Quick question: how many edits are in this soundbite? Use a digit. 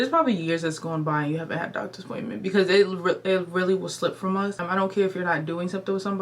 1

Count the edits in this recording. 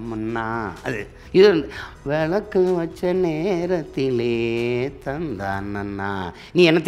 1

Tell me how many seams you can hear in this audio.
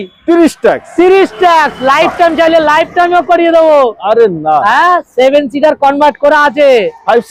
0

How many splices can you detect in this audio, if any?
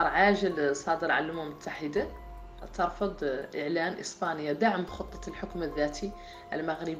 1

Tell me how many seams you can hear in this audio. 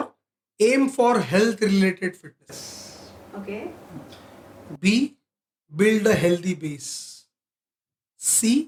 0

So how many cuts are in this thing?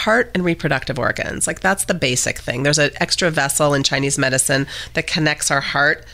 0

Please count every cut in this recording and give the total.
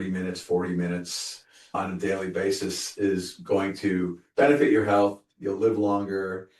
0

